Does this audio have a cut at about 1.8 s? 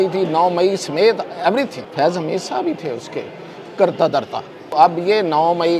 yes; 2 cuts; at 1.8 s, 4.7 s

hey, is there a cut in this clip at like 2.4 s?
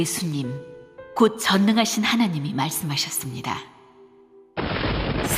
yes; 1 cut; at 2.4 s

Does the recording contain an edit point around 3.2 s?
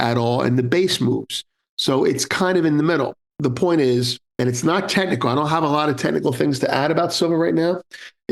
yes; 2 cuts; at 3.2 s, 4.2 s

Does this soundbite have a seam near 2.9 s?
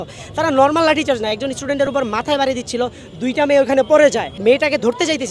no; 1 cut; at 4.3 s

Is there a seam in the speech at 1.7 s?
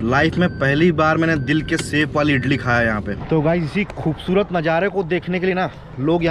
no; 1 cut; at 3.1 s

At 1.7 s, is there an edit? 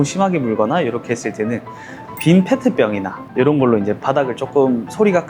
no; 0 cuts

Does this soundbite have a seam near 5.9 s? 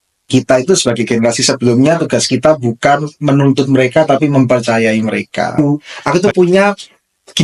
yes; 1 cut; at 5.9 s

